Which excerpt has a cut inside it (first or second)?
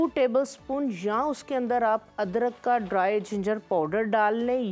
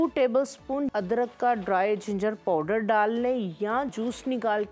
second